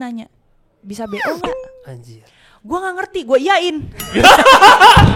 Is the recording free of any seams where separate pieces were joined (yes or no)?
yes